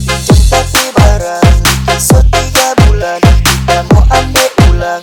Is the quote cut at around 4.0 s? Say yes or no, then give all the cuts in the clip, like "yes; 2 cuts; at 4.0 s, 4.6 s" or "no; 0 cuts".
no; 0 cuts